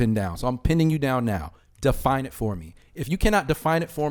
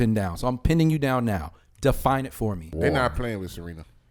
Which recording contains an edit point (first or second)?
second